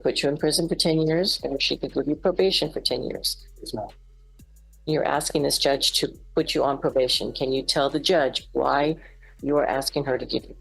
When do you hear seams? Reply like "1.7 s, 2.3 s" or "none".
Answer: none